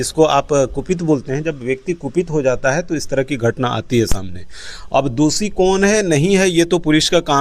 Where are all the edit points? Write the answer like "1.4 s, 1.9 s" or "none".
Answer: none